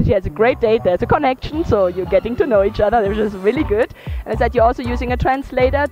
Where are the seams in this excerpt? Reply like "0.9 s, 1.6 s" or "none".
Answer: none

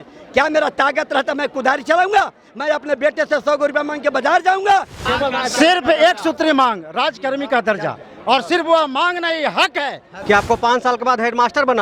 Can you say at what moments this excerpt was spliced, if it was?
5.0 s, 10.1 s

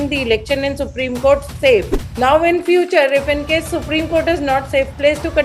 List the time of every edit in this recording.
2.0 s

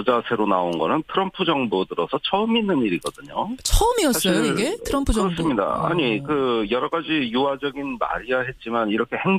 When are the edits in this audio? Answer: none

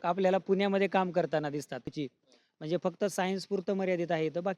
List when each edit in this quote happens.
2.0 s

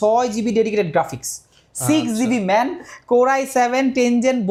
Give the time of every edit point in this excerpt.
none

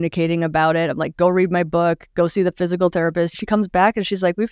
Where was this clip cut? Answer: 3.4 s

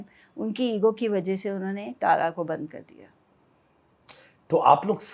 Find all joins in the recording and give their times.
none

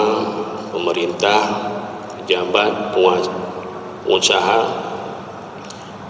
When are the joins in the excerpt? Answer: none

